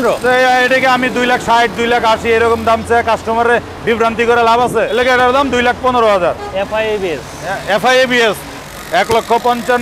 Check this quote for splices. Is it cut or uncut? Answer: cut